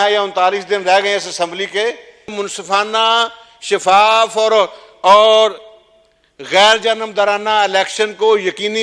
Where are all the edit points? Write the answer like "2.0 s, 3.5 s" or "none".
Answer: 2.3 s